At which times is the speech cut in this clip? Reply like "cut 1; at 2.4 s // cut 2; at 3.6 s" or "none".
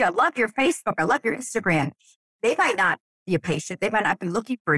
cut 1; at 2.3 s